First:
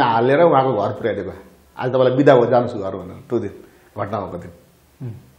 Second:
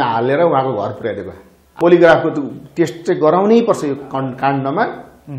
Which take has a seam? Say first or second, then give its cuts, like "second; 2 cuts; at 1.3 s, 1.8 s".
second; 1 cut; at 1.8 s